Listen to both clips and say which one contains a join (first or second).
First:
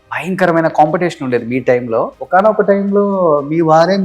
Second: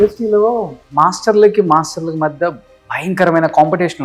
first